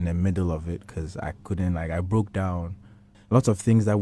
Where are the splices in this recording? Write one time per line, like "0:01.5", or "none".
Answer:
0:03.1